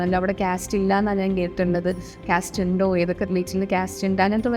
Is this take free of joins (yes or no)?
yes